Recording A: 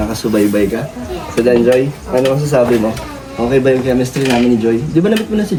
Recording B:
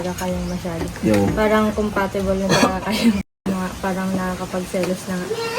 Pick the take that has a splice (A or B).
B